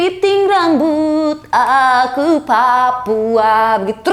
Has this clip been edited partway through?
no; 0 cuts

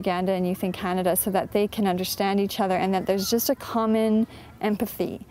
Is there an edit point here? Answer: no; 0 cuts

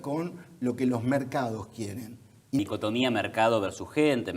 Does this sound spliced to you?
yes; 1 cut; at 2.6 s

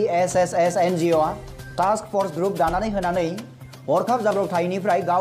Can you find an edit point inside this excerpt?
no; 0 cuts

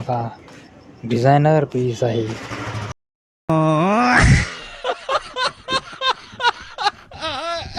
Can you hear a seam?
yes; 1 cut; at 3.1 s

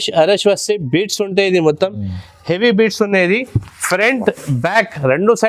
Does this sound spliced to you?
no; 0 cuts

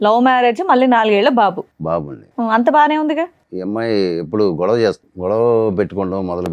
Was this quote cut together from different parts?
yes; 2 cuts; at 3.5 s, 5.1 s

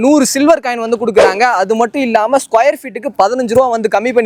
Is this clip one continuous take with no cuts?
yes; 0 cuts

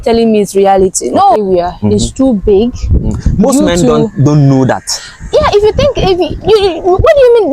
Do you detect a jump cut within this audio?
yes; 1 cut; at 1.4 s

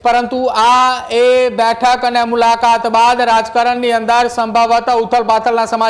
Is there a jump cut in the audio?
no; 0 cuts

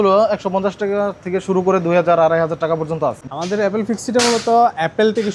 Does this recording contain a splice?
yes; 1 cut; at 3.2 s

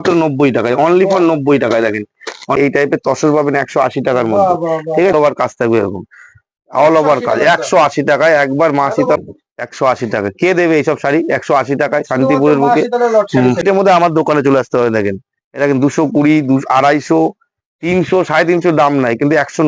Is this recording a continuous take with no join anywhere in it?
no; 4 cuts; at 2.6 s, 5.1 s, 9.2 s, 13.6 s

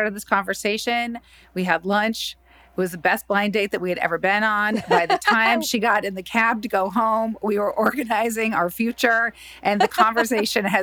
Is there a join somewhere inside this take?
no; 0 cuts

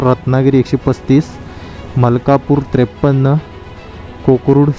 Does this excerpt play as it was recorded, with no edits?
yes; 0 cuts

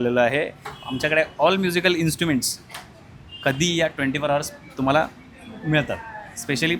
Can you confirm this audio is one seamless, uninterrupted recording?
yes; 0 cuts

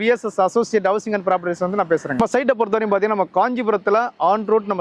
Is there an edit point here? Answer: yes; 1 cut; at 2.2 s

